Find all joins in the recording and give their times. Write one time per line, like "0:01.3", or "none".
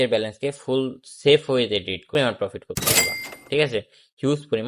0:02.1